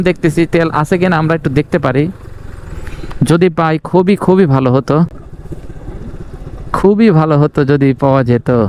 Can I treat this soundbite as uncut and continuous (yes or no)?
yes